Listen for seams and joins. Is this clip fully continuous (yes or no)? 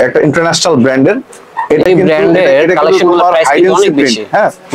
yes